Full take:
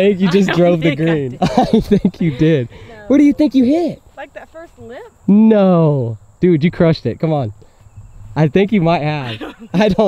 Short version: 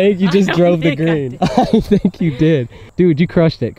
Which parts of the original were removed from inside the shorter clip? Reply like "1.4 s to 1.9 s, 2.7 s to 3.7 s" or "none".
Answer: 2.8 s to 6.2 s